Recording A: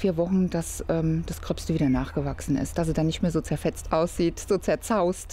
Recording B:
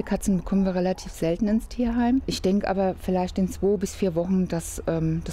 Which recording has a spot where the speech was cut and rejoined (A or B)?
B